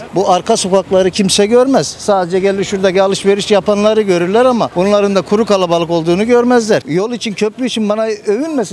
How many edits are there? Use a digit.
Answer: 1